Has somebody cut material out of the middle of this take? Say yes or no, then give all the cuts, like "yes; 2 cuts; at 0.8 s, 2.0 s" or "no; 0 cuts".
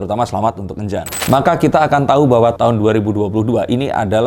yes; 1 cut; at 1.2 s